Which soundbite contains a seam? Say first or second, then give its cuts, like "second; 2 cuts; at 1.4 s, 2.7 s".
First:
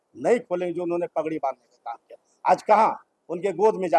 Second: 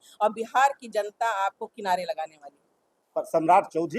second; 1 cut; at 3.0 s